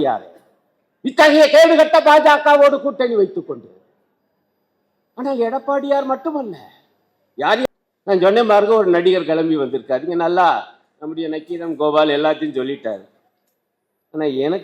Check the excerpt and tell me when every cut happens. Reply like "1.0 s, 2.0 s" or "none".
7.6 s